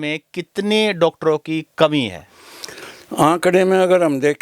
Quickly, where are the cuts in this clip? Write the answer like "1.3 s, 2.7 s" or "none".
none